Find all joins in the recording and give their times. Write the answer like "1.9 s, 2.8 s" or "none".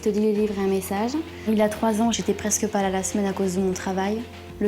1.3 s